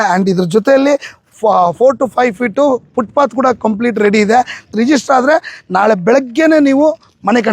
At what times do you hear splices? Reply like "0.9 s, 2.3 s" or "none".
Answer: 4.7 s